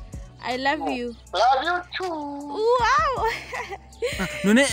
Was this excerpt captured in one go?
no; 1 cut; at 1.2 s

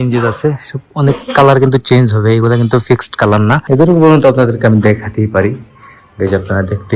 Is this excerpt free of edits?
no; 1 cut; at 3.6 s

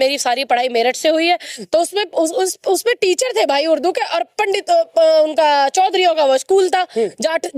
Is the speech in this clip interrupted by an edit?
no; 0 cuts

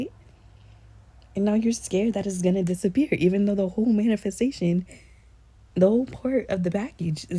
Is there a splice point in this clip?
no; 0 cuts

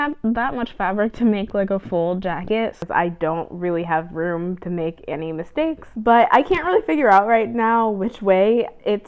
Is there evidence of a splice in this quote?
yes; 2 cuts; at 2.8 s, 5.9 s

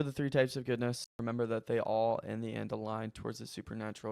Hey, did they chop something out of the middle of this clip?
yes; 1 cut; at 1.1 s

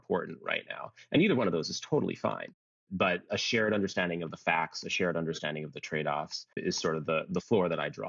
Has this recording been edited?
yes; 1 cut; at 6.4 s

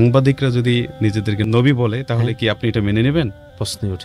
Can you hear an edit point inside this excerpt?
yes; 1 cut; at 1.4 s

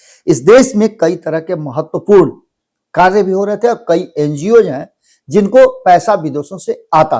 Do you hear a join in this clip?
no; 0 cuts

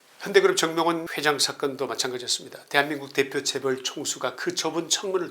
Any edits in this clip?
yes; 1 cut; at 1.1 s

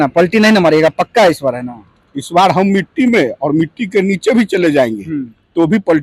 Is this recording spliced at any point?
no; 0 cuts

